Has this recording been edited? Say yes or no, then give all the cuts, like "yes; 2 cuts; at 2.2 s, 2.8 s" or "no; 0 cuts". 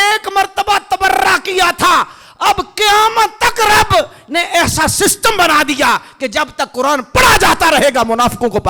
no; 0 cuts